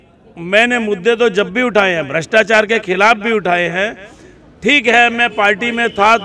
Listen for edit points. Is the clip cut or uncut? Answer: uncut